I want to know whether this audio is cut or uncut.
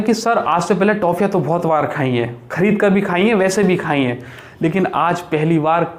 uncut